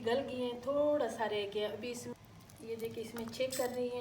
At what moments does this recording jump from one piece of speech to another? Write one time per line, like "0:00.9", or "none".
0:02.1